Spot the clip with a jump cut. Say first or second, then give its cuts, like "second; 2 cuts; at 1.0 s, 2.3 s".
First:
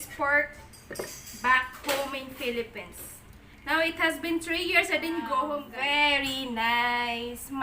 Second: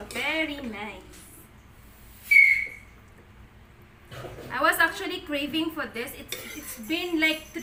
first; 1 cut; at 5.7 s